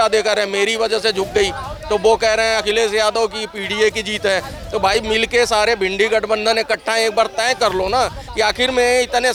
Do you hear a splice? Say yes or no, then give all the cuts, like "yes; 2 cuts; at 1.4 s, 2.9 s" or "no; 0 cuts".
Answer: no; 0 cuts